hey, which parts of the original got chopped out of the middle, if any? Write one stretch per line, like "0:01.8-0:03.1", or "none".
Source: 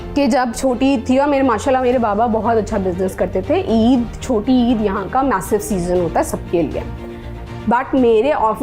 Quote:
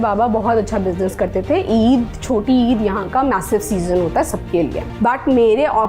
0:06.8-0:07.5